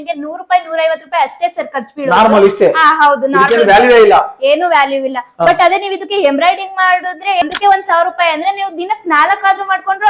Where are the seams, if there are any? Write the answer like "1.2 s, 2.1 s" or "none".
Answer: 7.4 s